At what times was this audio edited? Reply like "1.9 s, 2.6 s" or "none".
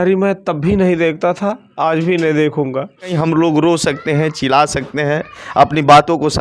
3.1 s